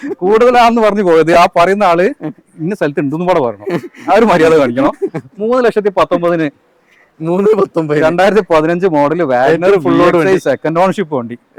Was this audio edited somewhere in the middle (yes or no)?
no